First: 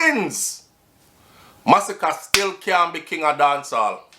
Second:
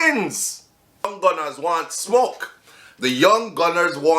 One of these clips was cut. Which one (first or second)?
second